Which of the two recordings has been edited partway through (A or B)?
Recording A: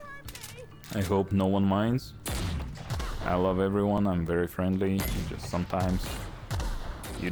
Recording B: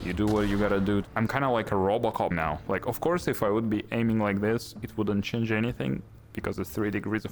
B